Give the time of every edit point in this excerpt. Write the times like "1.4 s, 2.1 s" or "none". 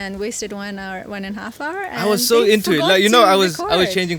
none